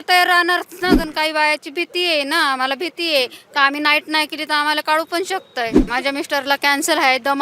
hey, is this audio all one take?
no; 2 cuts; at 1.0 s, 5.8 s

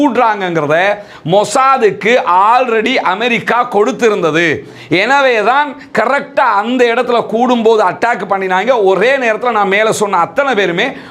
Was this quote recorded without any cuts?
yes; 0 cuts

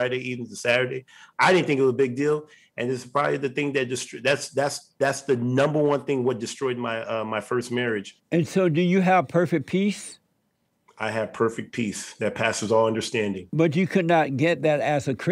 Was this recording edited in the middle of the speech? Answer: yes; 1 cut; at 8.1 s

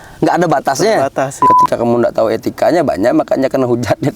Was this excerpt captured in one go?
no; 1 cut; at 1.4 s

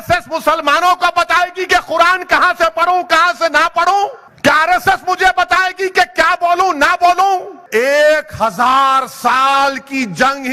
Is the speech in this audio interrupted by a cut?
yes; 2 cuts; at 4.2 s, 7.6 s

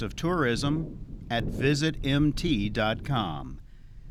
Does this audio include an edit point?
no; 0 cuts

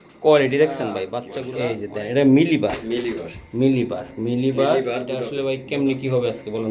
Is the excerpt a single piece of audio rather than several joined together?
no; 2 cuts; at 1.4 s, 5.2 s

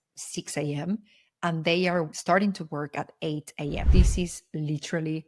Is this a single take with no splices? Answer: no; 2 cuts; at 2.1 s, 3.8 s

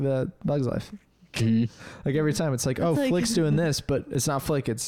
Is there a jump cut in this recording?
no; 0 cuts

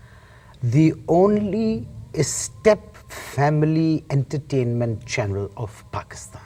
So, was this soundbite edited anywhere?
no; 0 cuts

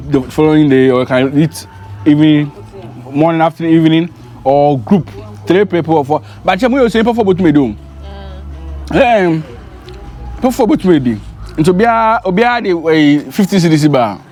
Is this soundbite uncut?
yes; 0 cuts

